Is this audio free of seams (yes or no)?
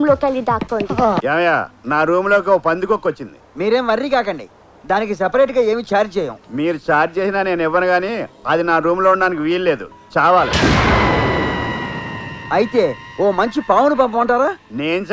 no